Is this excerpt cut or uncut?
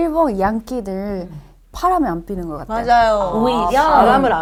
uncut